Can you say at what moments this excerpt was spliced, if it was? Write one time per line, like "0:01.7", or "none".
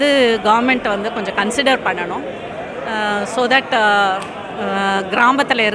none